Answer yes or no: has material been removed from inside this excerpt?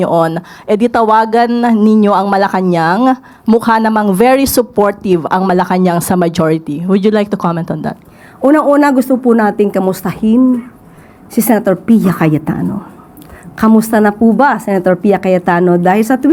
no